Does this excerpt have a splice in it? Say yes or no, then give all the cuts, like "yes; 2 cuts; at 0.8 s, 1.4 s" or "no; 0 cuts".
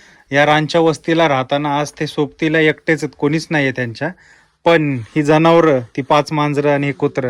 no; 0 cuts